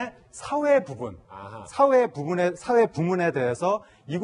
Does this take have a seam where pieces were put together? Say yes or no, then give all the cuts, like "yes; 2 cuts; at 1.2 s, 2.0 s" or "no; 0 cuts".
no; 0 cuts